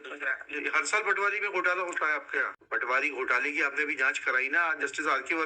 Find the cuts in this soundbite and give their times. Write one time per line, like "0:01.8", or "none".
0:02.6